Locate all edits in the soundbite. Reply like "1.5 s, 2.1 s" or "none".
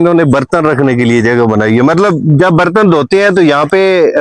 none